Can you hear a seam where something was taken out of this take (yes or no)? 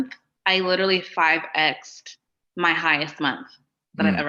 no